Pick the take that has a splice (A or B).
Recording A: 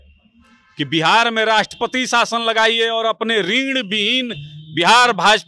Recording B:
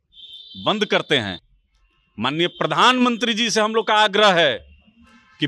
B